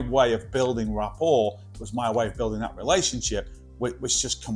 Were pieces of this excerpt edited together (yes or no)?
no